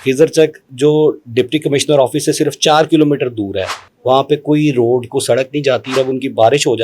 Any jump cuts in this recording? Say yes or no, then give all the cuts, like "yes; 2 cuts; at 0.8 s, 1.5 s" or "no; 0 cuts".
yes; 1 cut; at 5.9 s